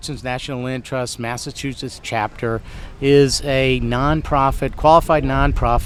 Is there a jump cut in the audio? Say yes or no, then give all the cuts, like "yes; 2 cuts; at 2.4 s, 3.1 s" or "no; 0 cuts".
no; 0 cuts